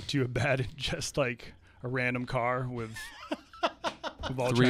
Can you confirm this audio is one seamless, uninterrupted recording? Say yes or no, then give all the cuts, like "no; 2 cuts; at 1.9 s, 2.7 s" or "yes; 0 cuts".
yes; 0 cuts